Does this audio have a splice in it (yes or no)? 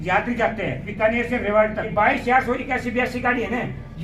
yes